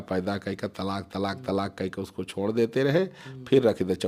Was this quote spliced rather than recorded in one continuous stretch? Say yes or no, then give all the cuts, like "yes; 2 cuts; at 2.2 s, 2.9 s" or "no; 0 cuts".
no; 0 cuts